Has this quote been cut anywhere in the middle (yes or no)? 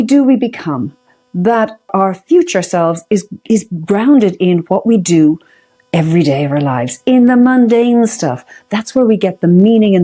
yes